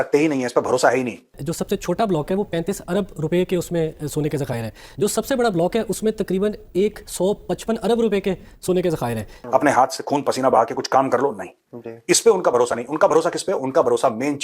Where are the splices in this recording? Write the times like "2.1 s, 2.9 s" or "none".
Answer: 1.3 s, 9.3 s